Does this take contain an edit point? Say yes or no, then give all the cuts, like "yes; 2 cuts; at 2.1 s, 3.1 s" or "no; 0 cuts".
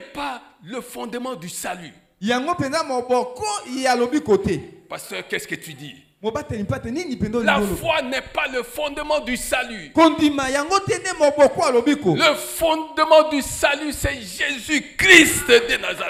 no; 0 cuts